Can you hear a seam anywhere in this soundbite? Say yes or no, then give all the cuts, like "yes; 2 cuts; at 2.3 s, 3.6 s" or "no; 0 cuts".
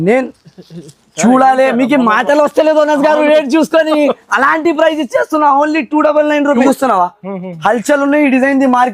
yes; 1 cut; at 6.6 s